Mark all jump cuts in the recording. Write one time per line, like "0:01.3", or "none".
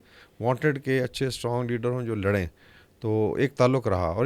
none